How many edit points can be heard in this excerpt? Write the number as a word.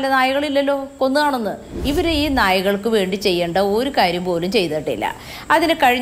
one